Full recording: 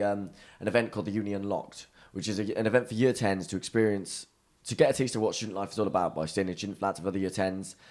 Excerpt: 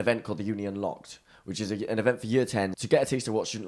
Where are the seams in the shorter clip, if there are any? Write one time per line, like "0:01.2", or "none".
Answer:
0:02.8